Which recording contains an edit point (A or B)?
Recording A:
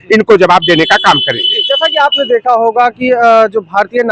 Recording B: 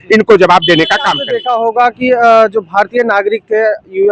B